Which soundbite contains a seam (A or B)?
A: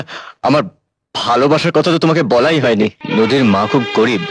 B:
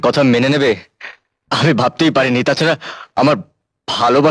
A